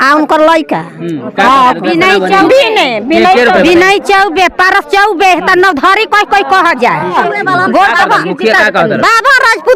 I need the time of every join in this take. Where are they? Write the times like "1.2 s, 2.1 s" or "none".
7.1 s